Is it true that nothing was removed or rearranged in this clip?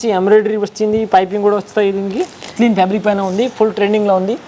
no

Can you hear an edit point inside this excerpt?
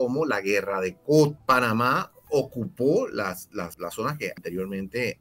yes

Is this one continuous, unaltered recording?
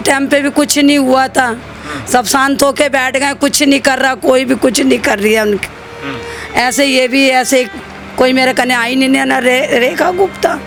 yes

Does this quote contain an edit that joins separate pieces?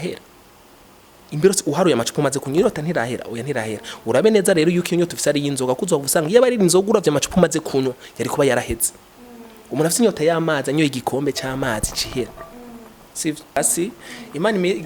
yes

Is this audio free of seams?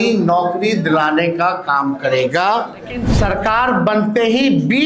no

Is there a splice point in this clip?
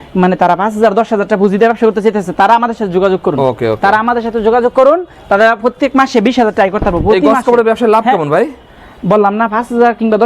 no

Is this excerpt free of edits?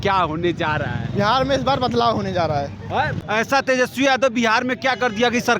no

